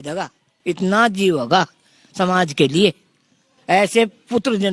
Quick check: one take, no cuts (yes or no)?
yes